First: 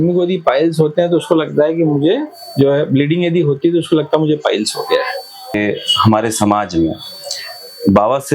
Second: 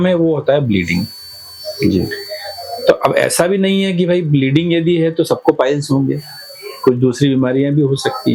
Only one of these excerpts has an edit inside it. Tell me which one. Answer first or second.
first